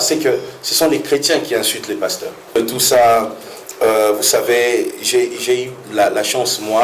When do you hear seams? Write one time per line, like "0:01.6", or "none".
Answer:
0:02.5